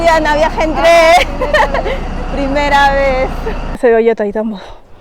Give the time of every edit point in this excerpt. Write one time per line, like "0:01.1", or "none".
0:03.8